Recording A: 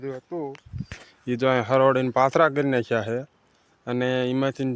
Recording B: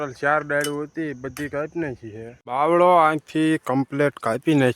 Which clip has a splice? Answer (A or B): B